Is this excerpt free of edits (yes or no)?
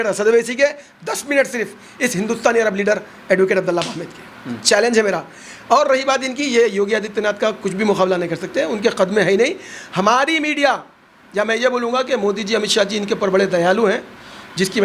yes